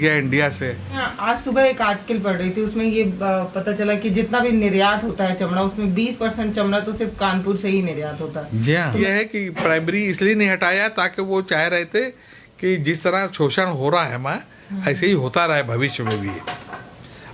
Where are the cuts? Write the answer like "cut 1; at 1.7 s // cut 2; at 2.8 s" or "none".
cut 1; at 1.0 s // cut 2; at 9.0 s